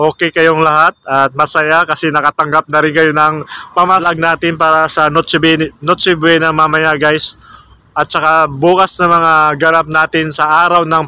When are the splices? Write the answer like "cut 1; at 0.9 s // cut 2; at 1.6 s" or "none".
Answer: cut 1; at 4.1 s